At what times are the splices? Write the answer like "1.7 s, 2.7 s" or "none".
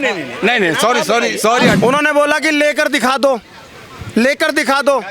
1.8 s